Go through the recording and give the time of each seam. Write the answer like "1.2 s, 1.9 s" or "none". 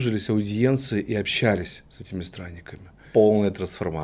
3.0 s